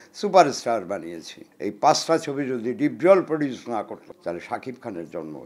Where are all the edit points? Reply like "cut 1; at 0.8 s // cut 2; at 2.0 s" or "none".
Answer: cut 1; at 1.4 s // cut 2; at 4.0 s